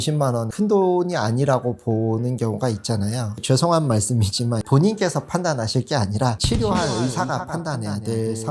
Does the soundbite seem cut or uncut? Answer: cut